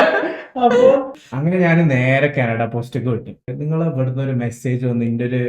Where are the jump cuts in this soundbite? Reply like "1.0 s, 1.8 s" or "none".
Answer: 1.2 s, 3.5 s